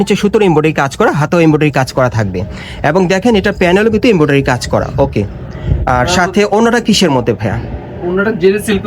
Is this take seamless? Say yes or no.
yes